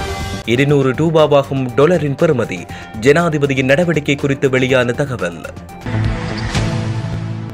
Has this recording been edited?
yes; 1 cut; at 5.8 s

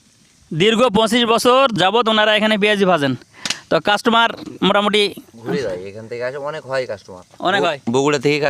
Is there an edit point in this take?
yes; 1 cut; at 1.8 s

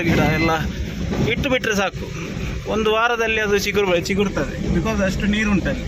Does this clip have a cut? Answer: no; 0 cuts

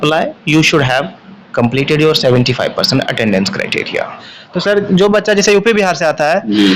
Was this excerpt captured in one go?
no; 1 cut; at 4.2 s

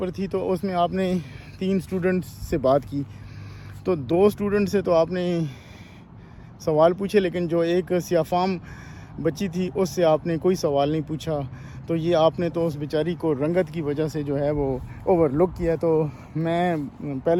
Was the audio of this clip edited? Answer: no; 0 cuts

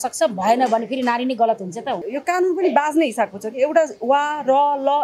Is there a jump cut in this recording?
yes; 1 cut; at 2.0 s

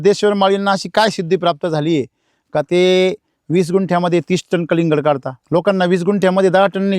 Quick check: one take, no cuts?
no; 1 cut; at 5.3 s

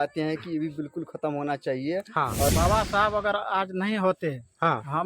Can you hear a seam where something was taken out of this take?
yes; 1 cut; at 2.5 s

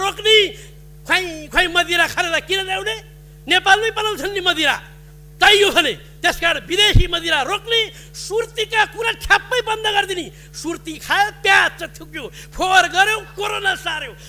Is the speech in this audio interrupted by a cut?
no; 0 cuts

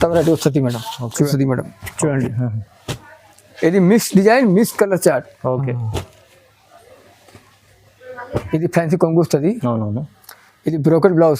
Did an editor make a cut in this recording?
yes; 2 cuts; at 1.3 s, 8.4 s

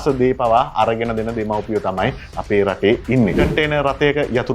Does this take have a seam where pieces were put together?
yes; 1 cut; at 3.4 s

